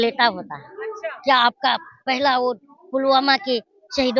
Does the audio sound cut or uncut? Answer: cut